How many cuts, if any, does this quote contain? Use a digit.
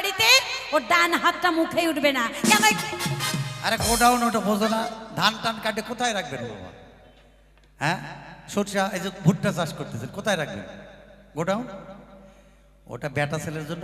0